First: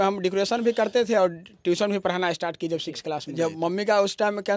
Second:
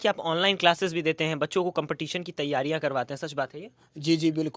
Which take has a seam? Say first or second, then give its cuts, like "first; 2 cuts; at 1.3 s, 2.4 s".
first; 1 cut; at 3.5 s